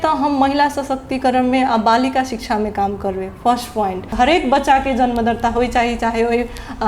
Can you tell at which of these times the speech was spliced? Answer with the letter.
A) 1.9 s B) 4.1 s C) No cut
B